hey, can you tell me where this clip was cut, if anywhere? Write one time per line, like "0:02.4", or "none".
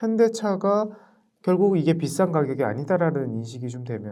none